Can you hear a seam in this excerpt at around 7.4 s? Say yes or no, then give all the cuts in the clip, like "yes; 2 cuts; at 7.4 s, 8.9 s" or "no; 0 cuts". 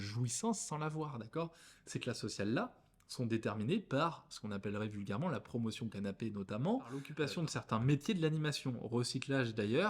yes; 1 cut; at 7.4 s